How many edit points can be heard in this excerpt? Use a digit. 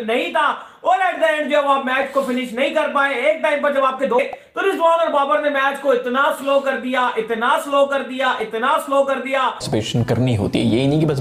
2